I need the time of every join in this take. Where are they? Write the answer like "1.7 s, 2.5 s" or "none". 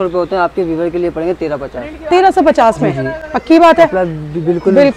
none